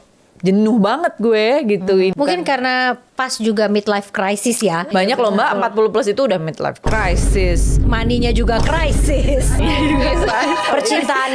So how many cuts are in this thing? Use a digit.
2